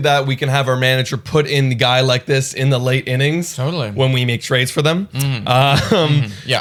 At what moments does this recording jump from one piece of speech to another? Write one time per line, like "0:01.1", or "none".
none